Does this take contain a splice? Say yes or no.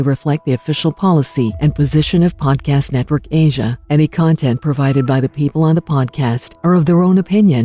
no